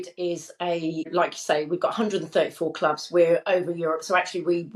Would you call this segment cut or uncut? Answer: cut